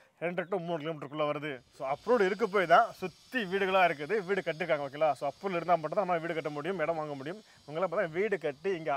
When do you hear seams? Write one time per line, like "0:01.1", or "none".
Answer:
0:01.7